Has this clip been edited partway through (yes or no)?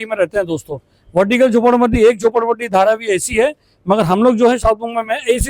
no